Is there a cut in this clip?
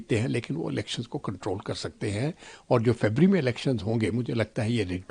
no; 0 cuts

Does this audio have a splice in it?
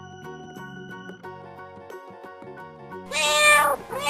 no; 0 cuts

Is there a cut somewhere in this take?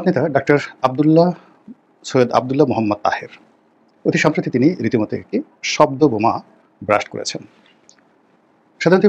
no; 0 cuts

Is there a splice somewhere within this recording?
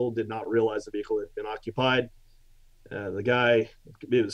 no; 0 cuts

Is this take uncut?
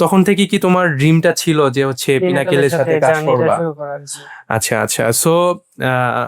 yes; 0 cuts

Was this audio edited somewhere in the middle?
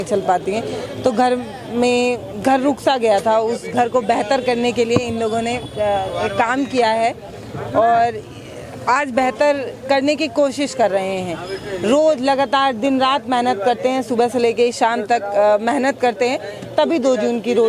no; 0 cuts

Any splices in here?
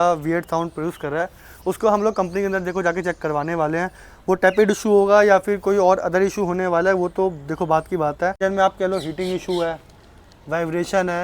yes; 1 cut; at 8.4 s

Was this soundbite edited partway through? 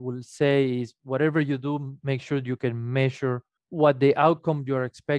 yes; 1 cut; at 3.6 s

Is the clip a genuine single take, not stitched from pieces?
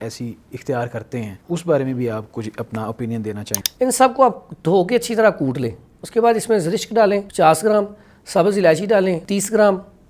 no; 4 cuts; at 1.4 s, 3.5 s, 7.3 s, 9.2 s

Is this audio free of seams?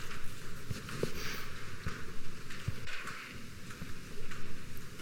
yes; 0 cuts

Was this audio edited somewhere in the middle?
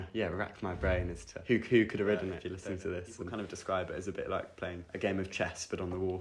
yes; 3 cuts; at 1.3 s, 2.7 s, 4.8 s

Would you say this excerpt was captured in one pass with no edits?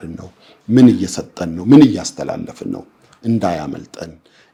yes; 0 cuts

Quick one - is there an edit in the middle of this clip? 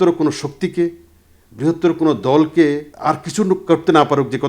yes; 1 cut; at 2.9 s

